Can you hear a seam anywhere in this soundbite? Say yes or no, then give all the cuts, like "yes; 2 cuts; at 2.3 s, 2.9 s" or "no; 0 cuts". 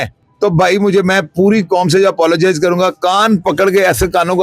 no; 0 cuts